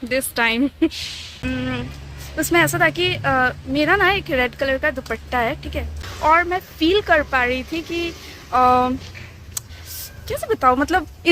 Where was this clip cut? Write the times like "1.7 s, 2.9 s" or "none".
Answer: 1.3 s, 6.1 s